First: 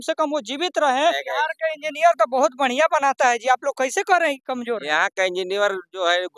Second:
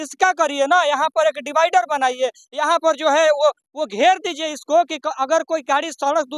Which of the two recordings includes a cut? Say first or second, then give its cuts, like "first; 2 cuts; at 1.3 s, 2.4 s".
first; 1 cut; at 1.2 s